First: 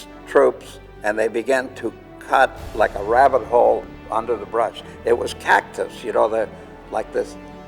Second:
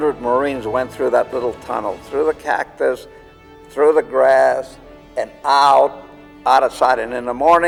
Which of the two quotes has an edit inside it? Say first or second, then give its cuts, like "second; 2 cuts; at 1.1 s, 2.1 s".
first; 1 cut; at 3.8 s